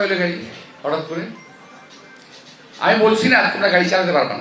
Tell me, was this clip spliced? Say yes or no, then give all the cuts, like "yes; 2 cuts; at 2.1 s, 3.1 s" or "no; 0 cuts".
no; 0 cuts